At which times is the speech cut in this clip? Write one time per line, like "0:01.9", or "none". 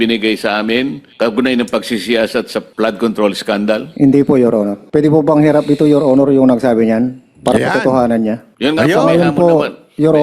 0:01.0
0:02.6
0:03.9
0:04.8
0:08.5